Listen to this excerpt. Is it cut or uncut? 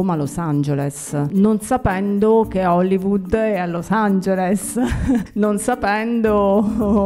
cut